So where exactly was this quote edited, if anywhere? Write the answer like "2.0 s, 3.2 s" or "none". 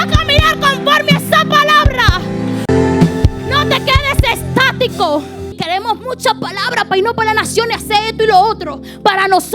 2.7 s, 5.5 s